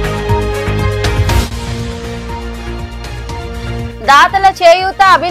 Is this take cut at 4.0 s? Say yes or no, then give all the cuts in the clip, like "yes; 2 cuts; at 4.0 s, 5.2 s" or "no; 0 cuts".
no; 1 cut; at 1.1 s